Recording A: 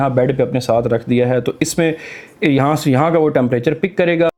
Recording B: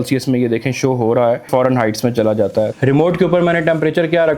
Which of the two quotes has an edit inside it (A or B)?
B